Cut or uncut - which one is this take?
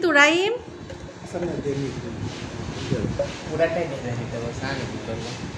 uncut